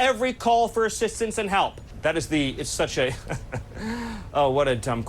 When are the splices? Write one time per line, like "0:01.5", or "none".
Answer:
0:01.9